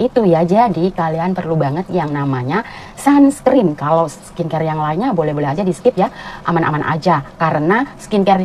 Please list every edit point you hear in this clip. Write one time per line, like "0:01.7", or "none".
none